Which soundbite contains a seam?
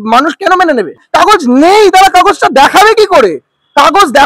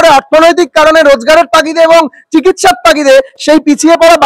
first; 1 cut; at 1.0 s

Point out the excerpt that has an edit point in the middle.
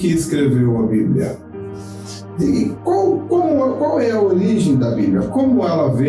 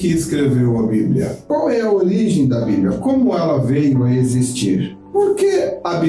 second; 2 cuts; at 1.5 s, 5.0 s

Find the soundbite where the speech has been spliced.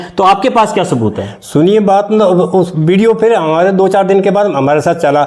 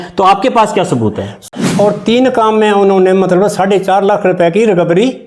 second; 1 cut; at 1.5 s

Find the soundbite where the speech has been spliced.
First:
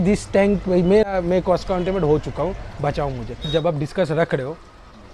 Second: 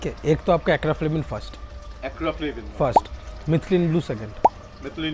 first; 2 cuts; at 1.1 s, 3.5 s

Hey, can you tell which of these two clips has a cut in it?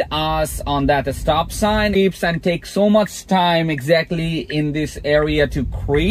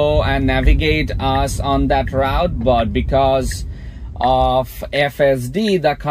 first; 1 cut; at 2.0 s

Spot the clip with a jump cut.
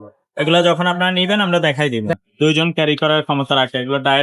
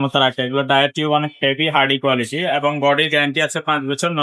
first; 1 cut; at 2.2 s

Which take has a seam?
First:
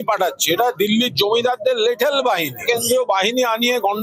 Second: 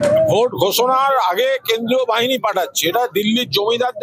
first; 1 cut; at 2.6 s

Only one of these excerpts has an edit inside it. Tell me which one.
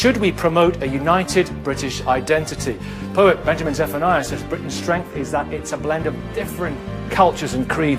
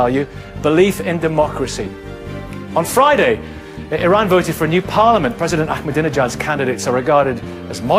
second; 1 cut; at 4.3 s

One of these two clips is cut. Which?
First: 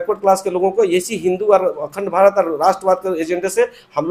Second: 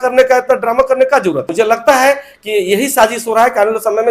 second; 1 cut; at 1.5 s

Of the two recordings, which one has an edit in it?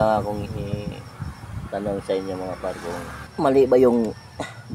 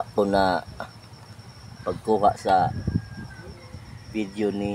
first; 1 cut; at 3.2 s

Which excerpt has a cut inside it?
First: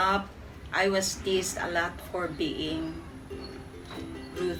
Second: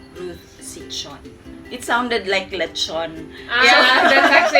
second; 1 cut; at 1.6 s

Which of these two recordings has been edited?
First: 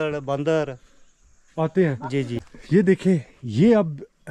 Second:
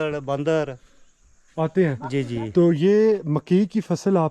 first; 1 cut; at 2.4 s

